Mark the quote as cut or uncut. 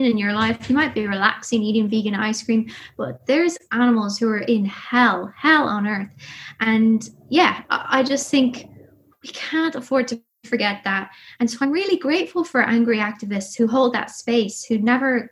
uncut